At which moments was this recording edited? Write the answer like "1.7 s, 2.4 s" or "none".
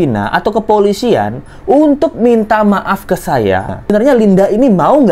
3.8 s